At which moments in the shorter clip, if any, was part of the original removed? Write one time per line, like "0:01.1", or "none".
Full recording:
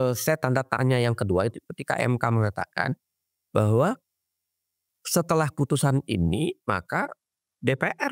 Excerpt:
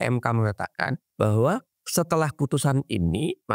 0:01.0
0:01.8